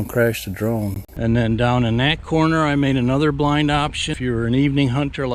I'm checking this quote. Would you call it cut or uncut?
cut